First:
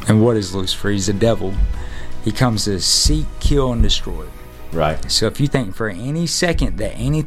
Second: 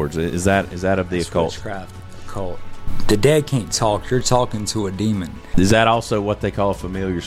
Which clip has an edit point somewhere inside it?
second; 2 cuts; at 2.8 s, 5.5 s

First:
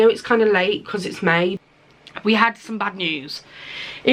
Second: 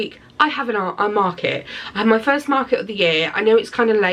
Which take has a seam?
first; 1 cut; at 1.6 s

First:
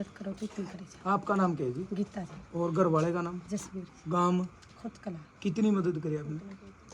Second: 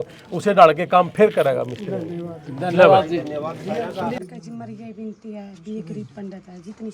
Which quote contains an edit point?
second; 1 cut; at 4.2 s

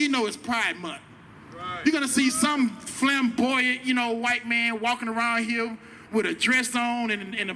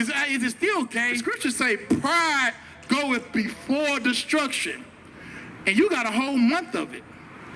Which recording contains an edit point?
second; 1 cut; at 1.2 s

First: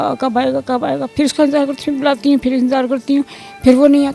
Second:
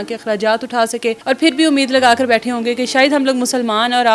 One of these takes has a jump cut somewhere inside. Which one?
second; 1 cut; at 1.2 s

